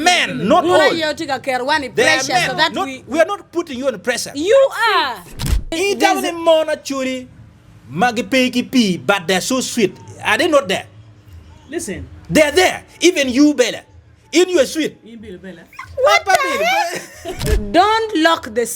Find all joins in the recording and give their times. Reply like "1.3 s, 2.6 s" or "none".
5.8 s, 17.5 s